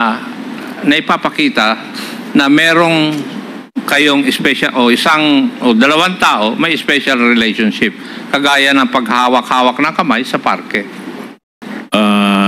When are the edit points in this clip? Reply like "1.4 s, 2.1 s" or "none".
none

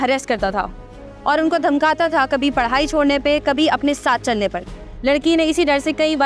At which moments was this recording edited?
none

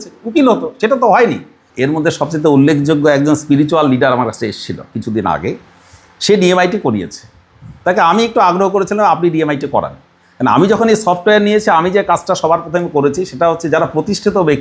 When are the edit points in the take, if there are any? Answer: 1.6 s

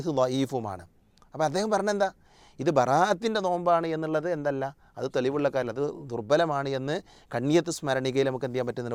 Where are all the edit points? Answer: none

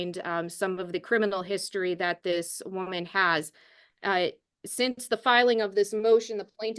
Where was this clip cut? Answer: none

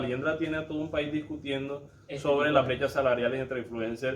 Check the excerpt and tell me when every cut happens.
none

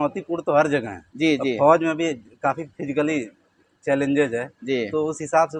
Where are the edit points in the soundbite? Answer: none

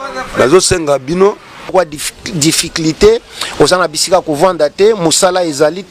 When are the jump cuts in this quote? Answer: 1.7 s

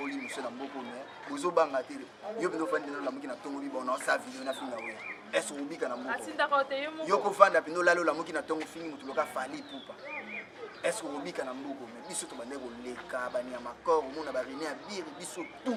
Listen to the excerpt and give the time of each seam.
none

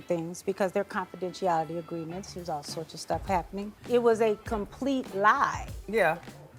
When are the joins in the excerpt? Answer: none

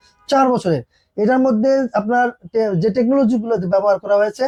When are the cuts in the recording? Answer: none

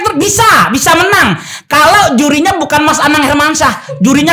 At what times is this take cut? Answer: none

